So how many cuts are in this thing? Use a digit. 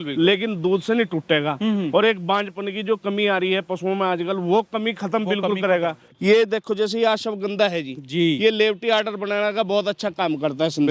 1